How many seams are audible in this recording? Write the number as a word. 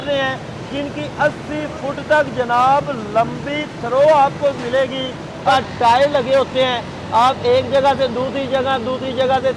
one